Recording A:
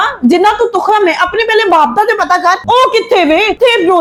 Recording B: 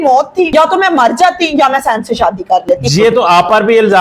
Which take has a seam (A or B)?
B